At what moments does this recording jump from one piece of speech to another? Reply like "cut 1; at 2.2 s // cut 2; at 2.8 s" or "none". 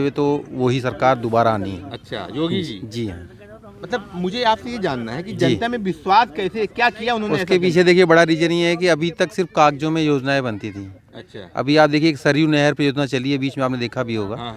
none